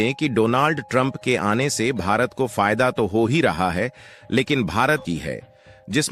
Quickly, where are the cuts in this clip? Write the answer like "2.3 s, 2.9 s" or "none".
5.0 s